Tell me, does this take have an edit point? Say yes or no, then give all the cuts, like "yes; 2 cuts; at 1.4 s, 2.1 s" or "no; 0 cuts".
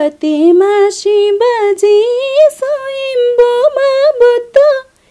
no; 0 cuts